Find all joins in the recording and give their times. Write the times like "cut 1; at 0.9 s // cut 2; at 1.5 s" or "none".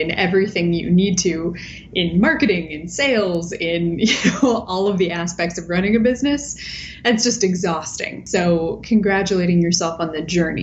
cut 1; at 8.2 s